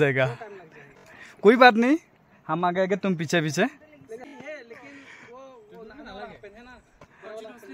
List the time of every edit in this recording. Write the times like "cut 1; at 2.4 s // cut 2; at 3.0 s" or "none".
cut 1; at 4.3 s